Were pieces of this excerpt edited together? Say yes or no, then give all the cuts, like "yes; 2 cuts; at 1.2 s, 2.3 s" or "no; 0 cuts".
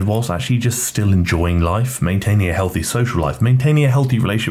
no; 0 cuts